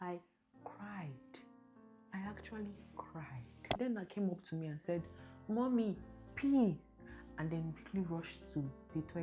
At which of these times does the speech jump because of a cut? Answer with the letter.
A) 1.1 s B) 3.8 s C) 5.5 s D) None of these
B